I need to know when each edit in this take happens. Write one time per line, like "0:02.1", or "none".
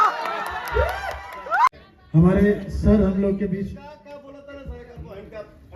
0:01.7